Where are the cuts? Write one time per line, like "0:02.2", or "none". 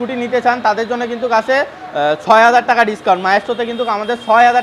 none